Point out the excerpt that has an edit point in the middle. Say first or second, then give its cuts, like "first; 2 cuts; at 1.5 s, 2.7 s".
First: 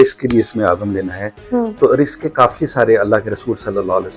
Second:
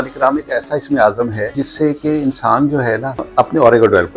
second; 2 cuts; at 1.6 s, 3.3 s